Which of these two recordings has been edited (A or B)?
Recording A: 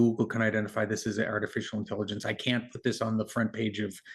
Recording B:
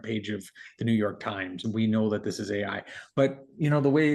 B